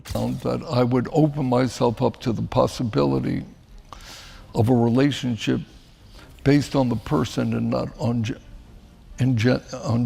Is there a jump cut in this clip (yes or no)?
no